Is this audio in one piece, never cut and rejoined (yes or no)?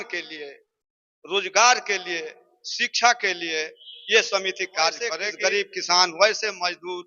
no